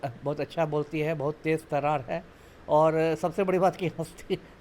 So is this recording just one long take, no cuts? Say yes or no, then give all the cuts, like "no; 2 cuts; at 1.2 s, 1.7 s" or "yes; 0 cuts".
yes; 0 cuts